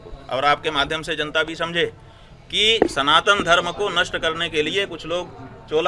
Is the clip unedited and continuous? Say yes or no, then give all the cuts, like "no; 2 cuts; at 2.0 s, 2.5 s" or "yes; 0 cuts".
yes; 0 cuts